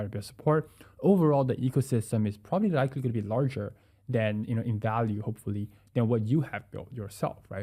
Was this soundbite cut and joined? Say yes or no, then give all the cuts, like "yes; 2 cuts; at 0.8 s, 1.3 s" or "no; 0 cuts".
no; 0 cuts